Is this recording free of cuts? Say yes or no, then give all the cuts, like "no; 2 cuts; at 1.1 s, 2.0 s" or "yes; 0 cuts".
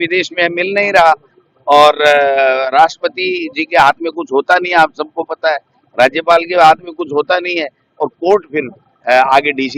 yes; 0 cuts